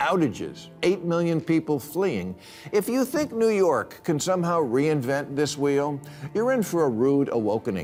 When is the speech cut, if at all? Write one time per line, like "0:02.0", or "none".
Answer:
none